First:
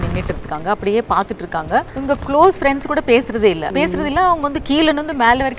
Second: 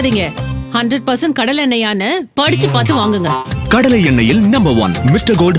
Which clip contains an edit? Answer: first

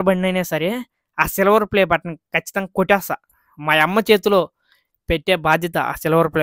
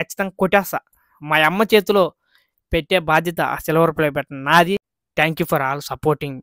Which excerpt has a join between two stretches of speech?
second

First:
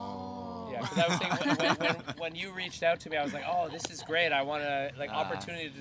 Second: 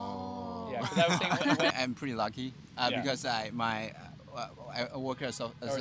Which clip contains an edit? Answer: second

